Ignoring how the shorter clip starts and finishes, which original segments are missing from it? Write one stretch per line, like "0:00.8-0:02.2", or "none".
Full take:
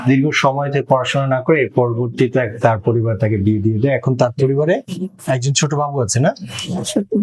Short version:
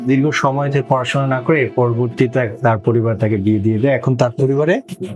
none